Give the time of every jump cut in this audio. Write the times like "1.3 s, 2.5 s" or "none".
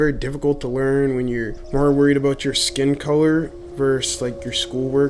1.6 s, 3.6 s